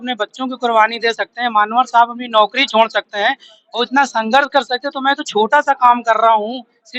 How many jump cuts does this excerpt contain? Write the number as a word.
zero